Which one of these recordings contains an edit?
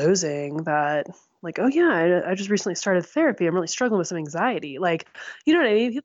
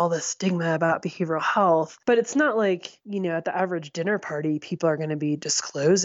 second; 2 cuts; at 1.9 s, 3.0 s

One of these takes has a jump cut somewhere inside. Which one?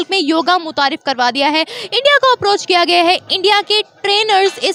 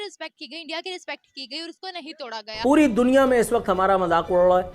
second; 1 cut; at 2.6 s

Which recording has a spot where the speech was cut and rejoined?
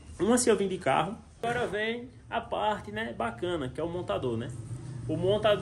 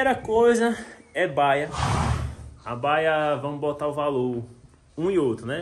first; 1 cut; at 1.4 s

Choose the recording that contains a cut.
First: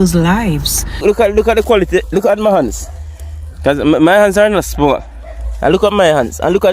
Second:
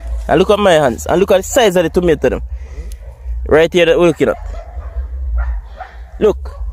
first; 1 cut; at 1.0 s

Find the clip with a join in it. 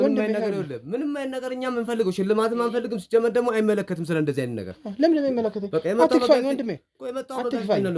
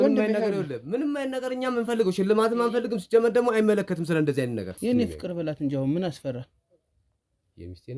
second; 1 cut; at 4.7 s

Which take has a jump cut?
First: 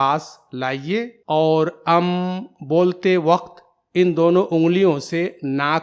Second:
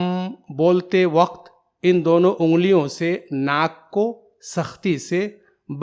first; 1 cut; at 1.2 s

